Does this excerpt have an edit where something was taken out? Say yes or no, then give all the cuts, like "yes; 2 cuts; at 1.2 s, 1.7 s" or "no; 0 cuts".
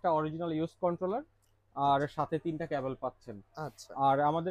no; 0 cuts